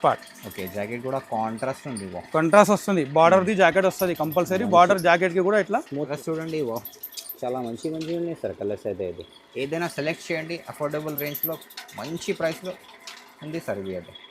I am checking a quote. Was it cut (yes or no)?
yes